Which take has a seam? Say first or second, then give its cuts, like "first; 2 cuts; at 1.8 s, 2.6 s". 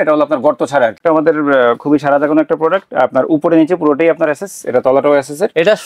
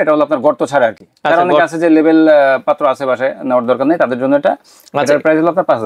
first; 1 cut; at 1.0 s